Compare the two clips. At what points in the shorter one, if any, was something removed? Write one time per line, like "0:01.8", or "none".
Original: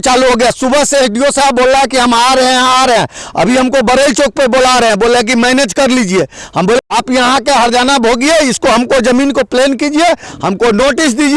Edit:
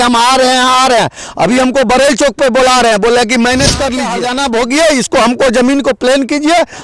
0:04.2